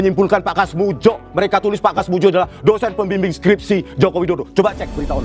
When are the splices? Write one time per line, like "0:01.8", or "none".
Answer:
none